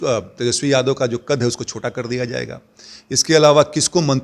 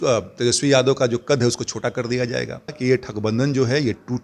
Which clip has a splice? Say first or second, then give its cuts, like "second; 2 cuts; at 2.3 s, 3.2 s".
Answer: second; 1 cut; at 2.8 s